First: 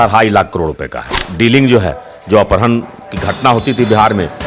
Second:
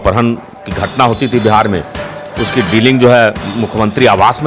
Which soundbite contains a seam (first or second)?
first